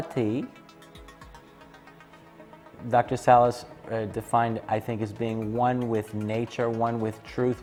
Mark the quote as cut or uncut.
uncut